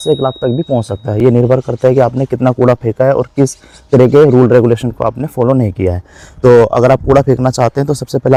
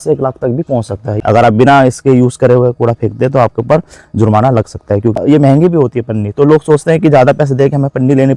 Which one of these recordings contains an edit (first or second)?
second